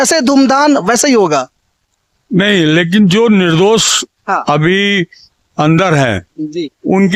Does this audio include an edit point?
no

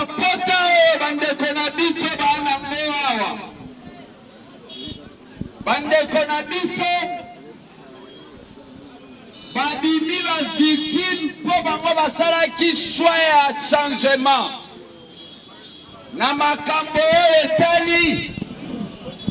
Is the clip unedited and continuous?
yes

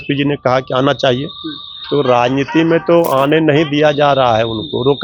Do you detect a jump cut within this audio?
no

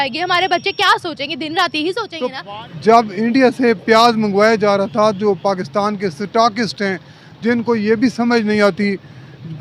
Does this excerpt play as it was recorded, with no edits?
no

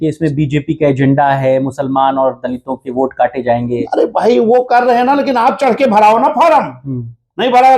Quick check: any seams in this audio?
no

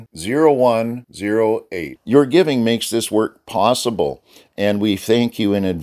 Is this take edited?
no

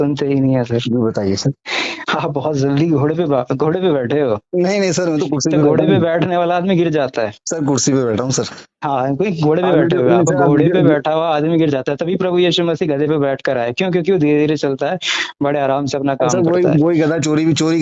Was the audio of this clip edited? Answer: no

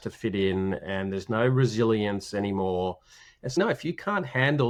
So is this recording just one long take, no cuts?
yes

